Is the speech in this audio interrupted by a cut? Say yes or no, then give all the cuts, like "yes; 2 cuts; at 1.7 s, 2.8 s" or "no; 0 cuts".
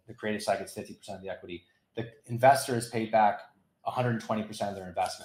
no; 0 cuts